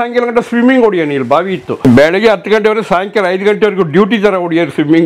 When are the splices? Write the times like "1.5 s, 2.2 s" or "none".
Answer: 1.8 s